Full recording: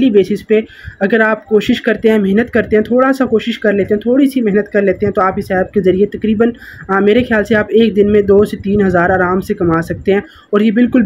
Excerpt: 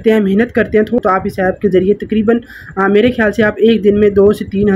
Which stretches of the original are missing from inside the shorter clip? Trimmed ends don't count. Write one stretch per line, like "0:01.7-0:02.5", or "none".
0:03.0-0:05.1